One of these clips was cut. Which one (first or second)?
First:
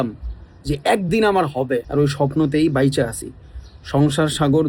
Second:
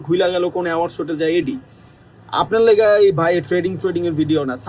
first